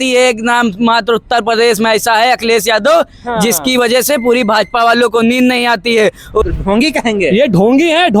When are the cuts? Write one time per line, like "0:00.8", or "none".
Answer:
0:06.4